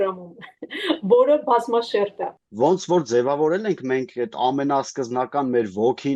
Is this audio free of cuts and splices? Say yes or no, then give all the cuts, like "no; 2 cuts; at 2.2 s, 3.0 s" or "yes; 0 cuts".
no; 1 cut; at 2.4 s